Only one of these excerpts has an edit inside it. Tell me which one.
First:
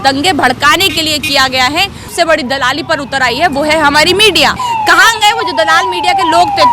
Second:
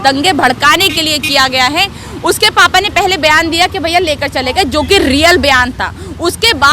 first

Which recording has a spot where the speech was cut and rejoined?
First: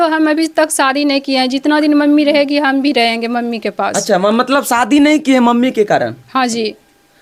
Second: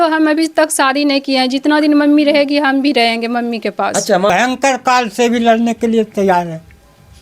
second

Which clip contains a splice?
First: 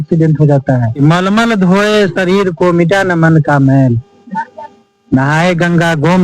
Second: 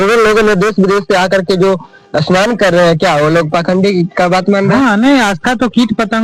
first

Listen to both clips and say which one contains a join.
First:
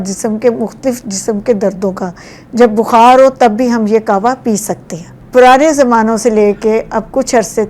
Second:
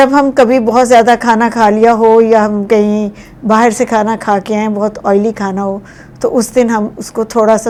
first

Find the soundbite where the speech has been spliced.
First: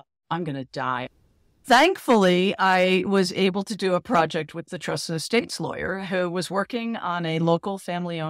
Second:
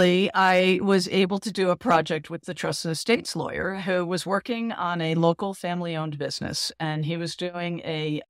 first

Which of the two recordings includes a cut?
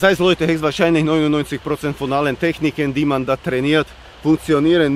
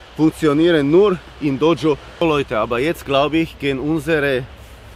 second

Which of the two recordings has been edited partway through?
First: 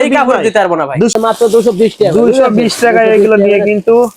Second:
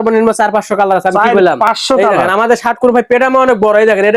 first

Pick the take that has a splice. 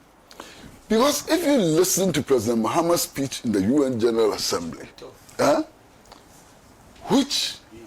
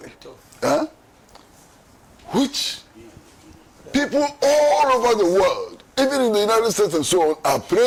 first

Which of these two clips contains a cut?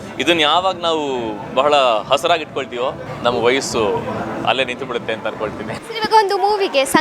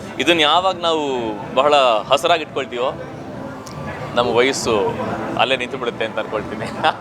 first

